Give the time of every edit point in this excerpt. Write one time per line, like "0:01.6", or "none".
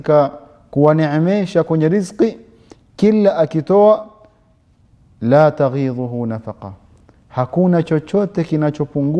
none